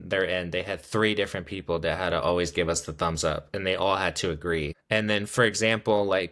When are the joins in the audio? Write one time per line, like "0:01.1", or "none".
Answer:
0:04.8